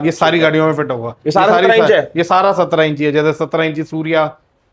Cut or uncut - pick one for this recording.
uncut